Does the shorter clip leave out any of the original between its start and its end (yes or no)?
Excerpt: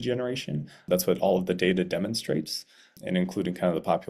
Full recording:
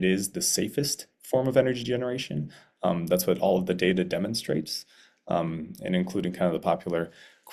yes